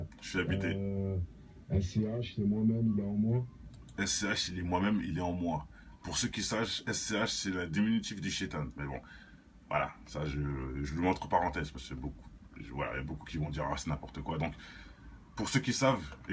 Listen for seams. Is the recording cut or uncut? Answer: cut